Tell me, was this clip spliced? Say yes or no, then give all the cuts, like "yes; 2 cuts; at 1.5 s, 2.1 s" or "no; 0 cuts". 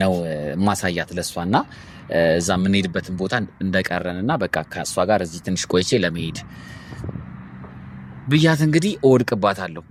no; 0 cuts